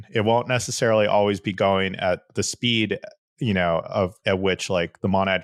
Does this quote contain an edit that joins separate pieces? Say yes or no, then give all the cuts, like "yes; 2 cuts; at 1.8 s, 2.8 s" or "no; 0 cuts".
no; 0 cuts